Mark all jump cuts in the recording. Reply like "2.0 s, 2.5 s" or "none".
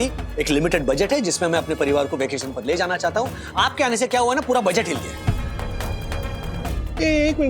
none